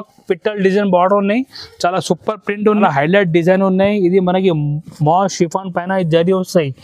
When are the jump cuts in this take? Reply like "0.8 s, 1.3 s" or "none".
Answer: 2.8 s

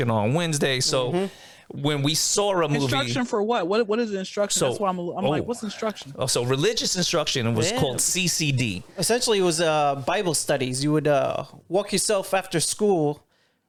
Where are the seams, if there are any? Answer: none

